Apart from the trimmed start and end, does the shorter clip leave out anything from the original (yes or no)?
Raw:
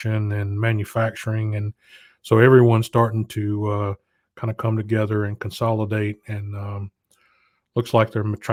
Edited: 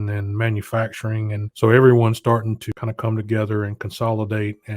yes